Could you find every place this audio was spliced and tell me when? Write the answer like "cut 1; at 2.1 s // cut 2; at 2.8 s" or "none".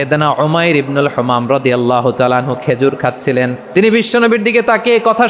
cut 1; at 3.6 s